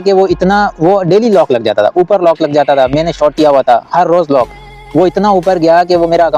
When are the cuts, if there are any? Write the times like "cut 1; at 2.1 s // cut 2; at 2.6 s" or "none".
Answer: none